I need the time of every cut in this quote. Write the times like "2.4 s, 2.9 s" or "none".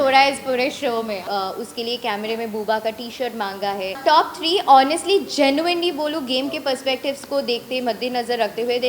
1.2 s, 4.0 s